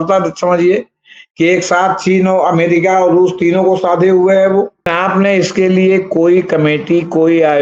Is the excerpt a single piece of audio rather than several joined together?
no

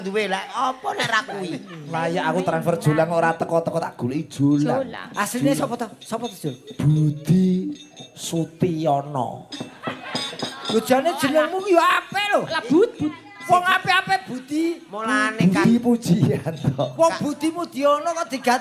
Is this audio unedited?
no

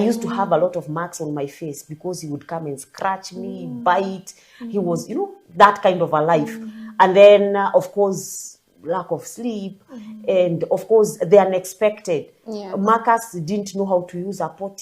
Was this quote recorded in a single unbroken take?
yes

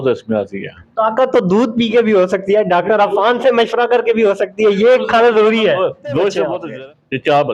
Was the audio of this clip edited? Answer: yes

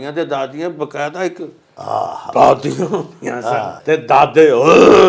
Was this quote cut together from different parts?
yes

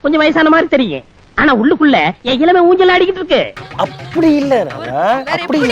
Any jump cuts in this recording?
yes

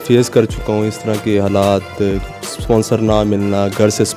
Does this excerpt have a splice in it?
no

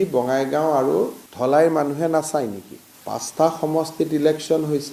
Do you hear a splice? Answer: no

